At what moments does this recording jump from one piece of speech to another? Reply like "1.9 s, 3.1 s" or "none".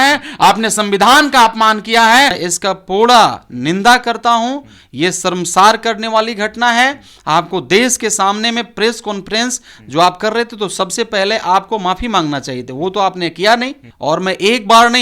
2.4 s, 13.9 s